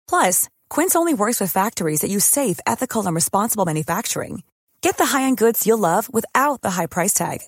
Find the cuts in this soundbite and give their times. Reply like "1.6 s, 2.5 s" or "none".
none